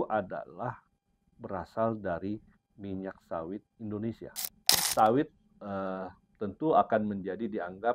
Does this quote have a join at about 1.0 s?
no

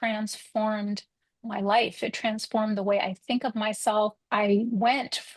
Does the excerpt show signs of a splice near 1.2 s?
no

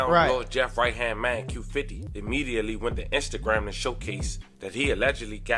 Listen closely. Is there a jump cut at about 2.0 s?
yes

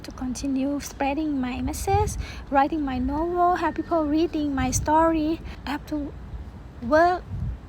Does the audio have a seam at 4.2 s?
no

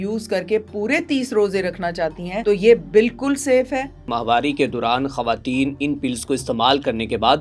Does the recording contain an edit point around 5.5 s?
no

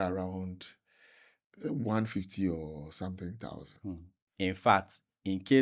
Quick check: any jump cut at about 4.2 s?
yes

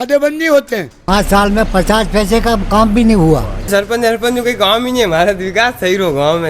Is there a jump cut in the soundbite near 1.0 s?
yes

